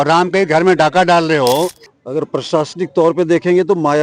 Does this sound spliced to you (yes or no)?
yes